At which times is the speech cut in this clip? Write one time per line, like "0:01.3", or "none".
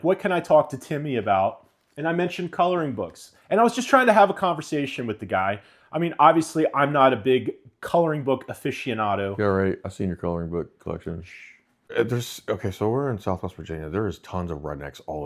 0:11.9